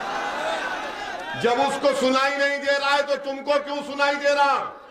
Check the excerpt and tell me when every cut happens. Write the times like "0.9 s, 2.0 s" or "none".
none